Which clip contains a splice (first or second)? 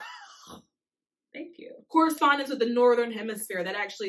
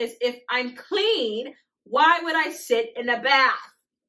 first